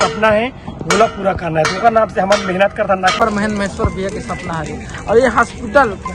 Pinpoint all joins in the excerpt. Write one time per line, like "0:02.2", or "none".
0:03.0